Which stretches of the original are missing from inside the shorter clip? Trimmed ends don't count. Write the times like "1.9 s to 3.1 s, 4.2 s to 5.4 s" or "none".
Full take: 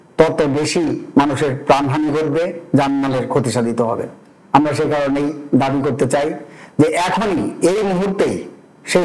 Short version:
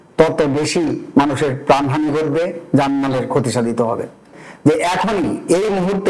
4.3 s to 6.5 s

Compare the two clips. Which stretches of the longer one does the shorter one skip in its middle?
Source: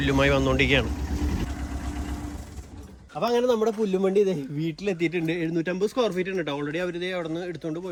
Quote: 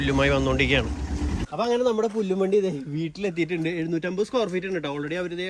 1.4 s to 3.1 s

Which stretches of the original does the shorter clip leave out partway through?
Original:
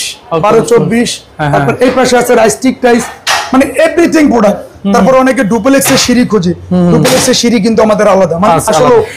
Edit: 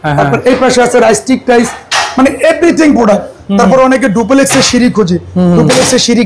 none

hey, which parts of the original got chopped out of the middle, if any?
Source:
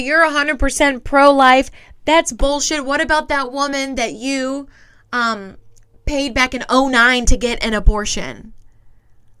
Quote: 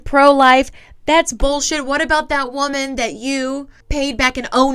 4.8 s to 5.9 s

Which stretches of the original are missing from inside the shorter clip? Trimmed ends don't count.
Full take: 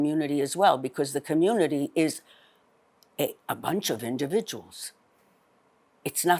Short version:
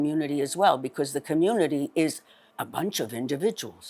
2.6 s to 3.5 s

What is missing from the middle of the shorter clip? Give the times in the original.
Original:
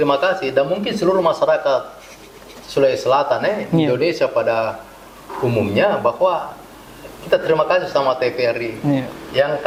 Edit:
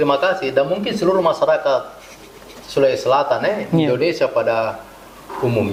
none

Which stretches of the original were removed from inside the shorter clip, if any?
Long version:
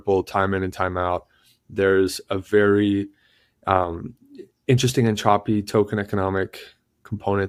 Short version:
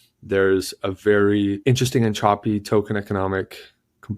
3.1 s to 4.6 s

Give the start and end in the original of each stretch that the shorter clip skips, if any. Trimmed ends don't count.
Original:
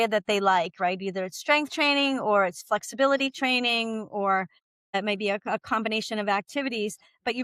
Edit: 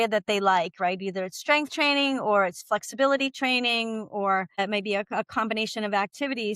4.5 s to 4.8 s

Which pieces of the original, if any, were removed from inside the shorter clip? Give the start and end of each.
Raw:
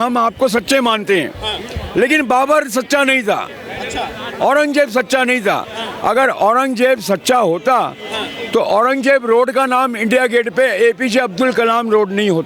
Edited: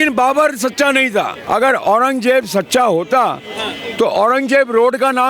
3.5 s to 5.9 s

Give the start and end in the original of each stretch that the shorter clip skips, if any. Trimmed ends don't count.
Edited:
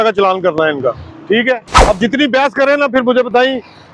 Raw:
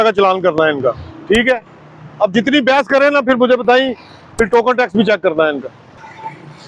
1.7 s to 2.0 s

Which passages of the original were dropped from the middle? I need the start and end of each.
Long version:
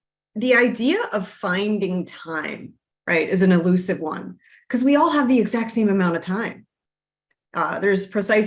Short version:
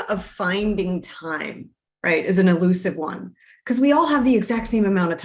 none

